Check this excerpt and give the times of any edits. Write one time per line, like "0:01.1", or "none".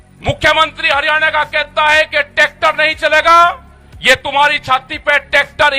none